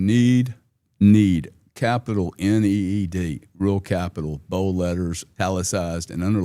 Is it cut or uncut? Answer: cut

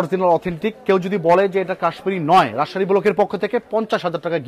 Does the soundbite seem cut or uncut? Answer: uncut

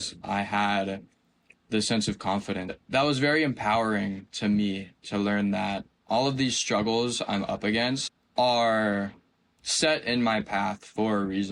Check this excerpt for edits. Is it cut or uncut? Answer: cut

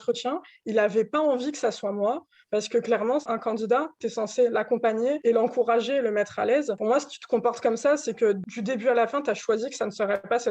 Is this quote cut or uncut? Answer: cut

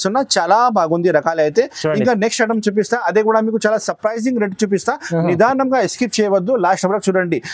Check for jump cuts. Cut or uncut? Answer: uncut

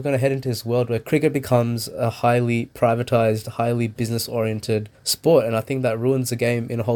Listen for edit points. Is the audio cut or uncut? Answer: cut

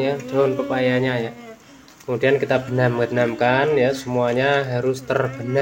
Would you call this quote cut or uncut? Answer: uncut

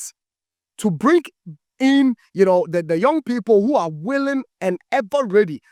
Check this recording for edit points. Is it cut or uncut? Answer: uncut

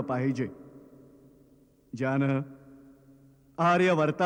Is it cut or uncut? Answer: uncut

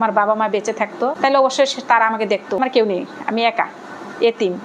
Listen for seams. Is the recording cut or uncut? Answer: cut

